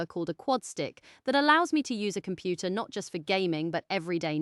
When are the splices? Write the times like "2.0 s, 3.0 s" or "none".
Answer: none